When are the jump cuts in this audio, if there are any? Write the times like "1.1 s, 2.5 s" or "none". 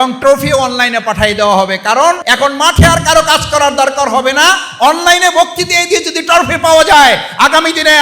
2.3 s